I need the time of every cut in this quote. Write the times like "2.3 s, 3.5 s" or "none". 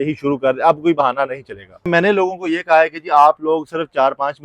1.8 s